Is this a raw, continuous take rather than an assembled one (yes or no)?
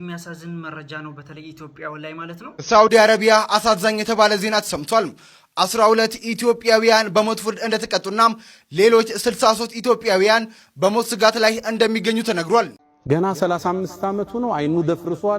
no